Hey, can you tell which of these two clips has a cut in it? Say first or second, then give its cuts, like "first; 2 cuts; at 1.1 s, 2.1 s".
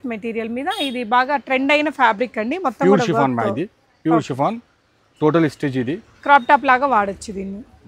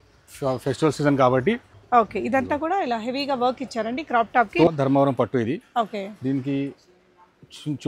second; 2 cuts; at 1.7 s, 4.7 s